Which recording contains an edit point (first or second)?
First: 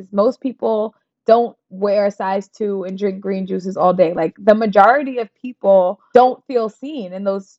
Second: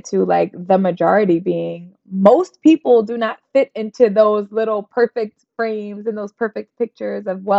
first